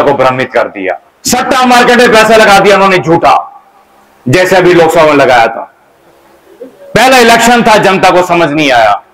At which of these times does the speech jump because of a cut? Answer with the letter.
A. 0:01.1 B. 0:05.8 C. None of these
A